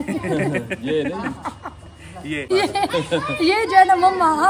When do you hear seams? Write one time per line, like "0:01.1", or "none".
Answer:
0:02.5